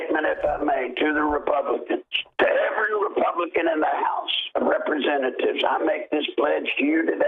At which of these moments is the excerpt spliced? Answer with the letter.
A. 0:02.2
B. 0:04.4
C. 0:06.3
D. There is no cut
A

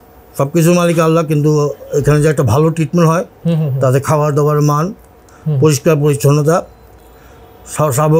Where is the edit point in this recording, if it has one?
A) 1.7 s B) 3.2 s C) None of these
C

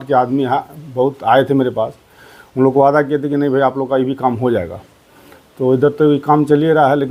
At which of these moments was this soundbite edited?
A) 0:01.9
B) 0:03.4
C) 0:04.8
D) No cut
D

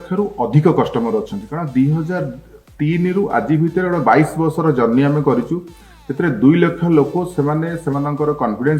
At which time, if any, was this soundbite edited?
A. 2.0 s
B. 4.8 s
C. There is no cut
C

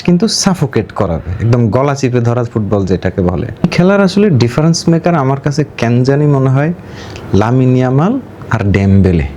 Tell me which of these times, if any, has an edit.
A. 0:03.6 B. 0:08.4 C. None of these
A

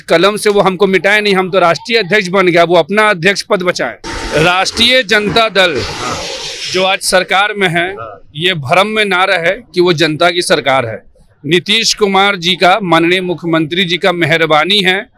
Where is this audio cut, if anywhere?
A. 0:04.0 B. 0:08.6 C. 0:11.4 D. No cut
A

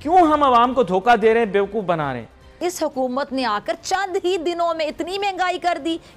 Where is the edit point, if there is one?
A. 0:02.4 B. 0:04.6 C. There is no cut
A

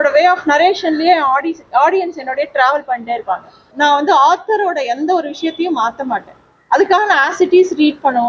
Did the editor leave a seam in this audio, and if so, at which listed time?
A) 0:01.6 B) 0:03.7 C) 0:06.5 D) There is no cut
B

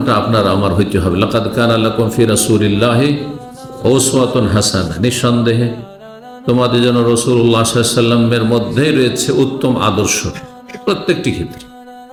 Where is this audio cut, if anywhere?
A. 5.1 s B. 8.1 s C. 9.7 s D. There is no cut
D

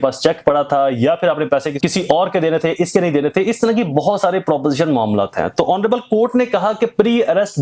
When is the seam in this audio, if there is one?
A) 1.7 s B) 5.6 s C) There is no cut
A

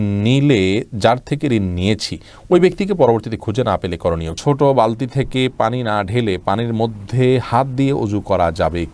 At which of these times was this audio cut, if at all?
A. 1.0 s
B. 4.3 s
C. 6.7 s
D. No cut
B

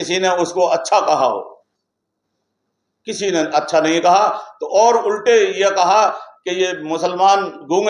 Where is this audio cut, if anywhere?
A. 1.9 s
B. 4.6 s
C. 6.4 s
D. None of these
D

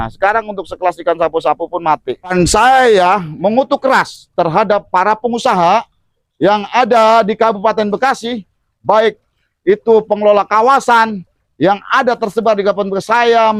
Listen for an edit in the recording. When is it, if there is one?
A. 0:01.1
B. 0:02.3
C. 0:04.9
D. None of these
B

